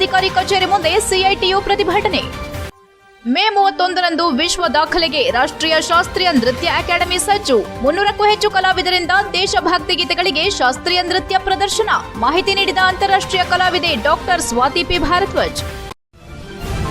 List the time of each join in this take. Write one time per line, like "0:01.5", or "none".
0:15.9